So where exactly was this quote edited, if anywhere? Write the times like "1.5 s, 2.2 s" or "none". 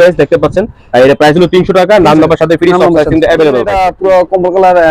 3.8 s